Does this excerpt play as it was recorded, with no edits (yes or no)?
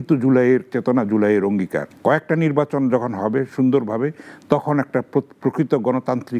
no